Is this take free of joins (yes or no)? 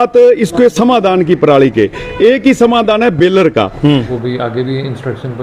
no